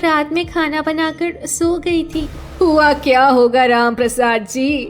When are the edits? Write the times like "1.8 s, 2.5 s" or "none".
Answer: 2.4 s